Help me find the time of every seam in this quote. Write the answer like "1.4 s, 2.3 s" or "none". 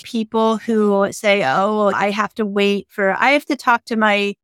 none

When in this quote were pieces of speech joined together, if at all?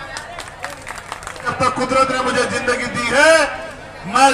1.5 s

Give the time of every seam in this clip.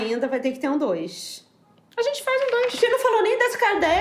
none

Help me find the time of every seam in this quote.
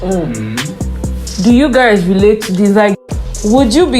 3.0 s

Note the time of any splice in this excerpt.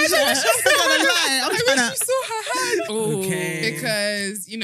2.9 s

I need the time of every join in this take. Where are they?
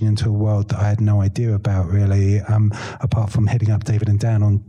none

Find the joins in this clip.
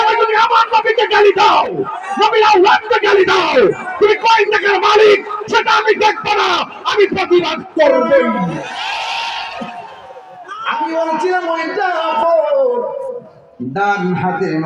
10.9 s

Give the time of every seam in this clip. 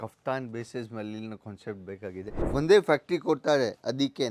2.4 s

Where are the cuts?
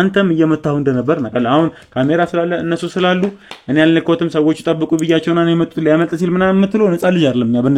none

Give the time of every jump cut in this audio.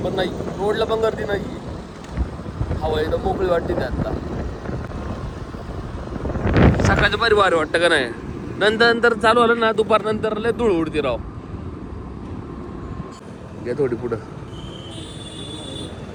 none

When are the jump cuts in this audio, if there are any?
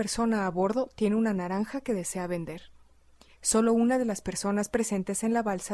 1.3 s

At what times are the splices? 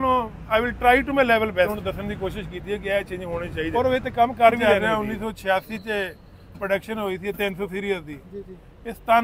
1.7 s, 3.7 s, 4.6 s

